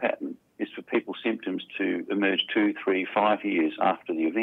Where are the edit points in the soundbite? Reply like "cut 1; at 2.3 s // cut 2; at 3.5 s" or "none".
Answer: none

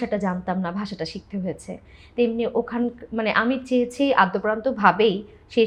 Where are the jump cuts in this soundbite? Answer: none

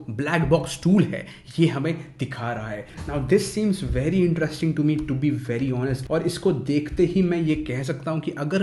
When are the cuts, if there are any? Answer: cut 1; at 3.0 s // cut 2; at 6.0 s

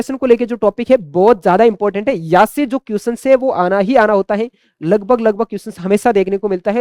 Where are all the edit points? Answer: none

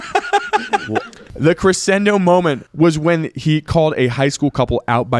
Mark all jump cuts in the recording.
cut 1; at 2.6 s

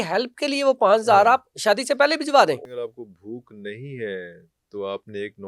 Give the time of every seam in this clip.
cut 1; at 2.6 s

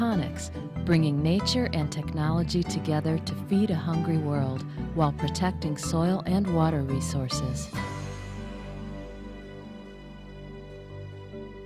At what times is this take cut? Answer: none

